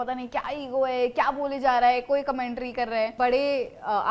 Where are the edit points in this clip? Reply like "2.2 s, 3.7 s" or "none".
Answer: 3.1 s